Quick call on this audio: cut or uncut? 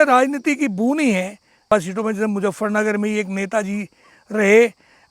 cut